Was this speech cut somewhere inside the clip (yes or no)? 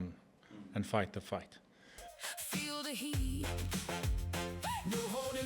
yes